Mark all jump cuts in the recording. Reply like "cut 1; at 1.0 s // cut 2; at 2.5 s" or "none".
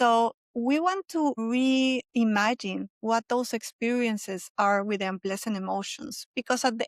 cut 1; at 1.4 s